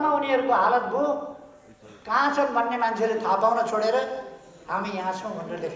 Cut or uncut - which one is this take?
uncut